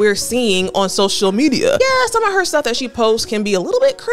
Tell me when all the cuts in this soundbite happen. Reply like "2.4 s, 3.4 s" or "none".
1.8 s